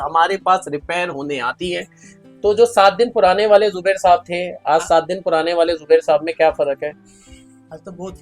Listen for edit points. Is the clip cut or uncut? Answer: cut